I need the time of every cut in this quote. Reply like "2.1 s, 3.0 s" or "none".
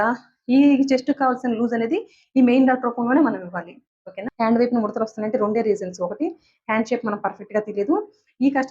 4.2 s